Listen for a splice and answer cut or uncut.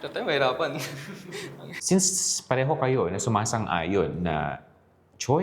cut